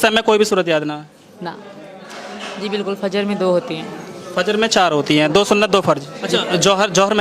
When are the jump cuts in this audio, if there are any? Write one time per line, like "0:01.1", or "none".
0:01.7
0:06.1